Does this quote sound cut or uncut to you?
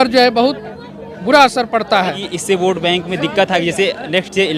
cut